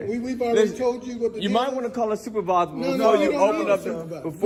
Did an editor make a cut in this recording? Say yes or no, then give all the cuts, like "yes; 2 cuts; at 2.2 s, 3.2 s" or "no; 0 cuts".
no; 0 cuts